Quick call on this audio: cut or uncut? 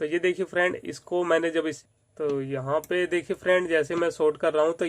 cut